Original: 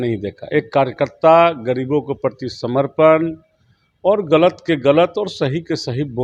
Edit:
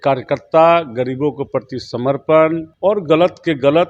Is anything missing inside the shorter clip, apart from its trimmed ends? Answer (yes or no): yes